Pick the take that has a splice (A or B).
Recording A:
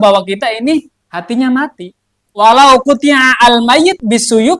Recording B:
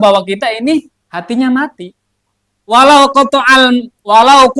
A